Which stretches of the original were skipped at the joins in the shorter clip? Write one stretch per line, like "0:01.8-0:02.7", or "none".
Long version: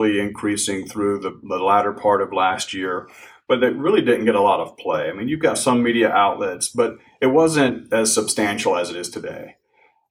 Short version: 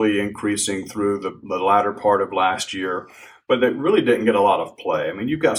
none